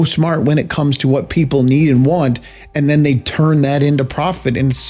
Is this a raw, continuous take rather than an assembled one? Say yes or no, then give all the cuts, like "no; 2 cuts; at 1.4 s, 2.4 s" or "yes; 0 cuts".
yes; 0 cuts